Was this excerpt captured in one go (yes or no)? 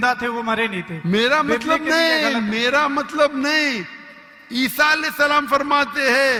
yes